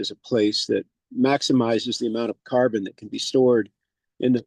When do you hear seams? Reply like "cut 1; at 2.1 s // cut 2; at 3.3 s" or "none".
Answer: none